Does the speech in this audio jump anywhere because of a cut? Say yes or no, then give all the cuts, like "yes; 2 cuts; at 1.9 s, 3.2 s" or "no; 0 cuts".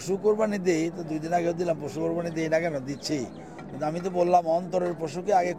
no; 0 cuts